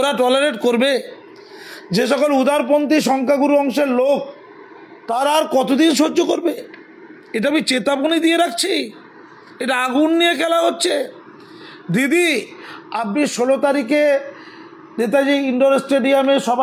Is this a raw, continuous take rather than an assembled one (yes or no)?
yes